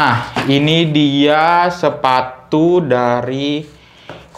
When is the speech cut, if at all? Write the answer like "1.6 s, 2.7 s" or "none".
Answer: none